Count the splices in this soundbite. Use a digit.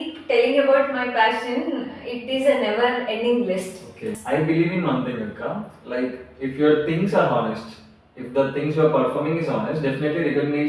1